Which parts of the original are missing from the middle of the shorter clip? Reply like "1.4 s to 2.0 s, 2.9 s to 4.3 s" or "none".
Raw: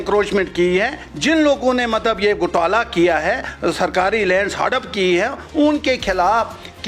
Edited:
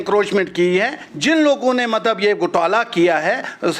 none